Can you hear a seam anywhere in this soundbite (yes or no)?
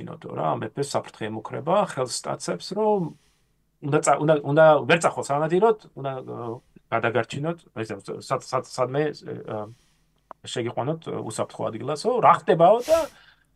no